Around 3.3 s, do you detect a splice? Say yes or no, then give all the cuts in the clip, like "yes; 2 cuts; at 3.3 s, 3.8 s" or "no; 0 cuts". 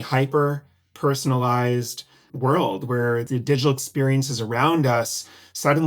yes; 2 cuts; at 2.2 s, 3.3 s